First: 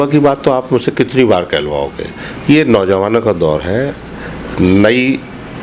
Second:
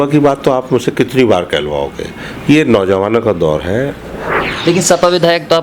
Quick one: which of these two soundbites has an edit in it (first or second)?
second